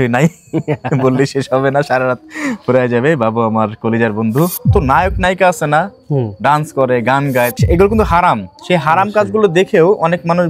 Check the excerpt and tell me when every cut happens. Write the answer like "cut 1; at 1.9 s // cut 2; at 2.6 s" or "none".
cut 1; at 4.7 s // cut 2; at 7.6 s

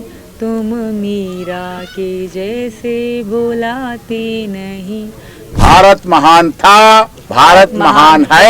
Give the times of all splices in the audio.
cut 1; at 5.5 s // cut 2; at 7.5 s

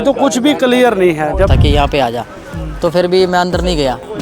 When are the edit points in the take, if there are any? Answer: cut 1; at 1.5 s

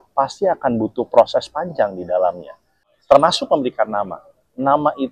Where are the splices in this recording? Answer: cut 1; at 2.9 s

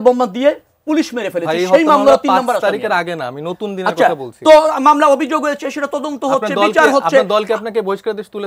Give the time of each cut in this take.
none

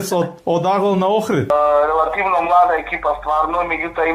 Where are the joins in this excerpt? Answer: cut 1; at 1.5 s

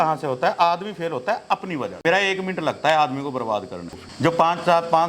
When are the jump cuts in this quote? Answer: cut 1; at 2.0 s // cut 2; at 3.9 s

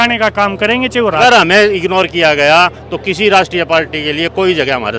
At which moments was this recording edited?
cut 1; at 1.2 s

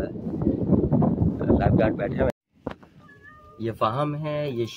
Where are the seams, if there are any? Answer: cut 1; at 2.3 s

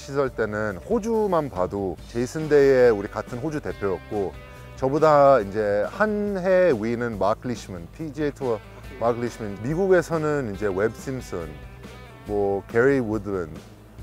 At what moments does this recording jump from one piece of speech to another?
cut 1; at 2.0 s // cut 2; at 9.5 s

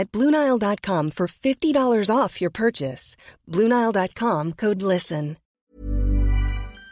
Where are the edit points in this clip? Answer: cut 1; at 5.4 s

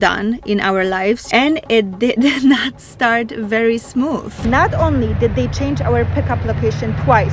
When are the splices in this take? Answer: cut 1; at 1.2 s // cut 2; at 4.3 s

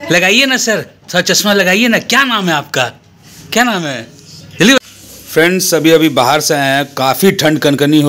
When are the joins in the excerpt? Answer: cut 1; at 4.8 s

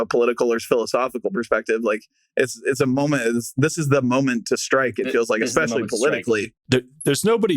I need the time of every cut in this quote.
cut 1; at 6.6 s

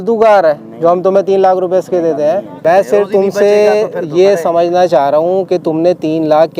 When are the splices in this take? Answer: cut 1; at 2.5 s

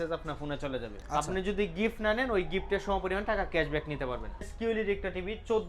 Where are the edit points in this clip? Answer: cut 1; at 0.9 s // cut 2; at 4.5 s

